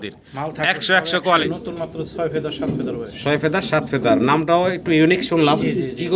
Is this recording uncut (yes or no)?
no